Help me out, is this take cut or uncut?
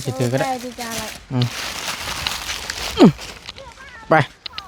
uncut